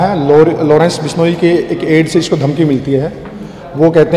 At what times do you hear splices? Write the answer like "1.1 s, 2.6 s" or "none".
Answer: none